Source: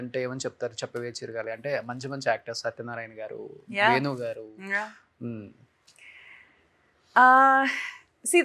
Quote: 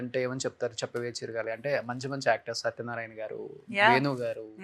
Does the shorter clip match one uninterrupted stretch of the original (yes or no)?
yes